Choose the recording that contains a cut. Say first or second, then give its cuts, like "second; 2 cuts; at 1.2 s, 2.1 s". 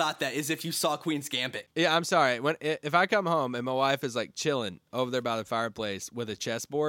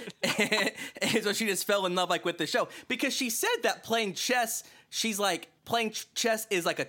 first; 1 cut; at 1.6 s